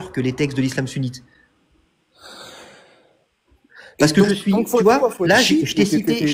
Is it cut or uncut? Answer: uncut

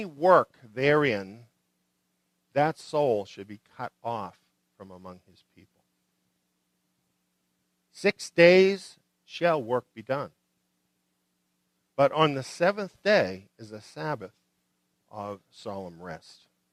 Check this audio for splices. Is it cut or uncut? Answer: uncut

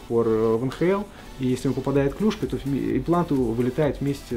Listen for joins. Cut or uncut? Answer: uncut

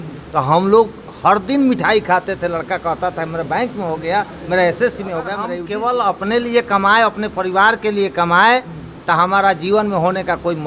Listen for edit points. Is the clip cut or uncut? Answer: cut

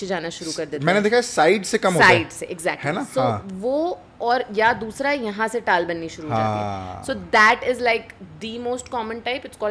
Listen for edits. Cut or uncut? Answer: uncut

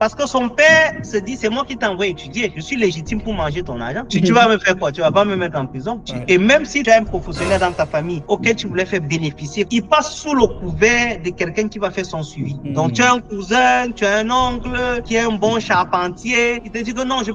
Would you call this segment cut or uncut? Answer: cut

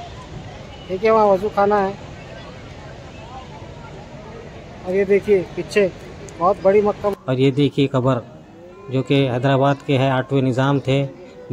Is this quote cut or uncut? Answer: cut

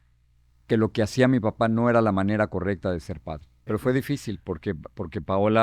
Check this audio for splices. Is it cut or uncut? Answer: cut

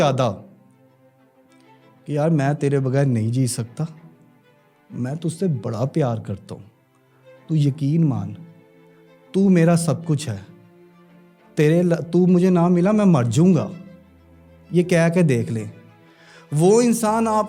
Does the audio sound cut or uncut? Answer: uncut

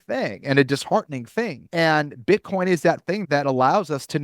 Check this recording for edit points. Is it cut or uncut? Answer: cut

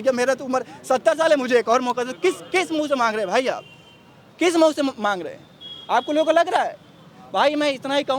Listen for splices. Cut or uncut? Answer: uncut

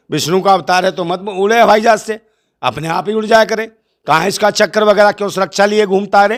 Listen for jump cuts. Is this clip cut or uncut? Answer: uncut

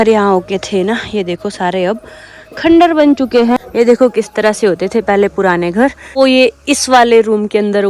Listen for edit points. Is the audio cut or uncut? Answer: cut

